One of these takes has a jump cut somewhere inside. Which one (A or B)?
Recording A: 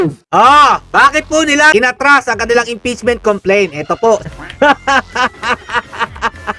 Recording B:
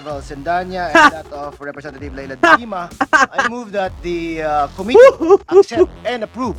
A